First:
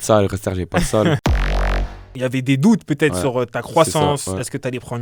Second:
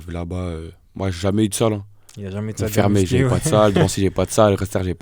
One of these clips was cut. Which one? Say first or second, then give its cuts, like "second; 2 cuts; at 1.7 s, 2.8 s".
first; 1 cut; at 1.7 s